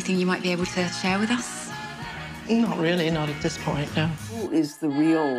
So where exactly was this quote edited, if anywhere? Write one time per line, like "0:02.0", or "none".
0:04.4